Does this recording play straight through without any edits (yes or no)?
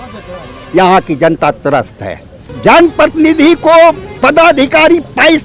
no